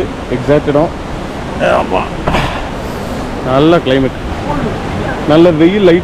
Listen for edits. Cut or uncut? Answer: cut